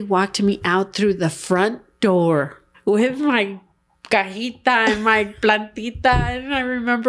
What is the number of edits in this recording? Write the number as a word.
one